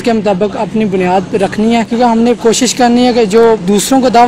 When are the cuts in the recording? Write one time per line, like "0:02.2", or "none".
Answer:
0:01.9